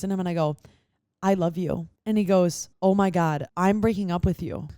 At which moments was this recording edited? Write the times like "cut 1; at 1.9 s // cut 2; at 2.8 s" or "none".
cut 1; at 1.9 s // cut 2; at 2.7 s // cut 3; at 3.5 s